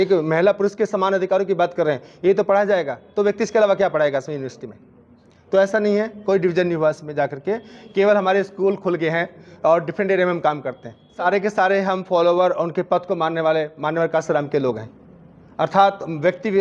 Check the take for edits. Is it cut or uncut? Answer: cut